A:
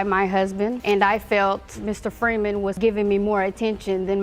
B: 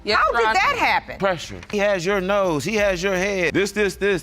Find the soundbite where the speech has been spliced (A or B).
B